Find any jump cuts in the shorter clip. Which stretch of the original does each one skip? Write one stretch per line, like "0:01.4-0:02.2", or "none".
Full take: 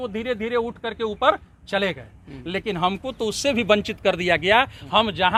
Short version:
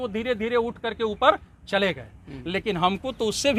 none